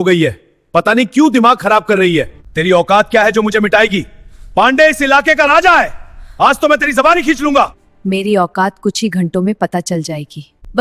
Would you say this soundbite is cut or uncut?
cut